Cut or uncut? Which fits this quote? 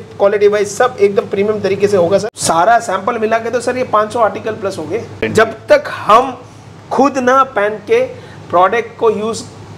cut